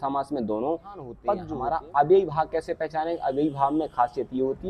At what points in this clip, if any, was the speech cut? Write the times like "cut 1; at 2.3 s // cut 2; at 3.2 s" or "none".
cut 1; at 1.5 s